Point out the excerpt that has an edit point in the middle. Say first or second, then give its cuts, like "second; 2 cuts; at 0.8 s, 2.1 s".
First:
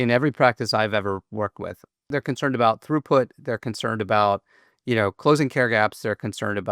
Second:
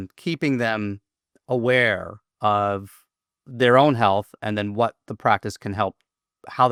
first; 1 cut; at 2.0 s